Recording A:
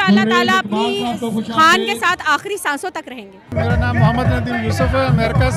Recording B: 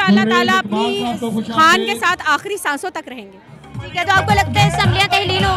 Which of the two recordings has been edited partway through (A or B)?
A